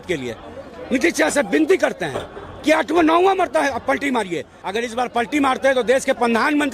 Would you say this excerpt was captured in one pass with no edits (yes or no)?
no